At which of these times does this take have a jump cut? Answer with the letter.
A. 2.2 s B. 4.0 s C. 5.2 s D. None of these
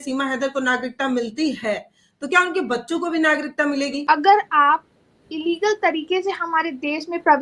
B